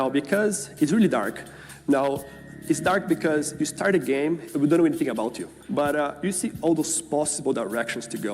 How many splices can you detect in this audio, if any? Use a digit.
2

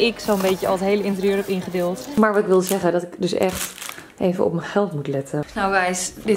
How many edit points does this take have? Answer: 2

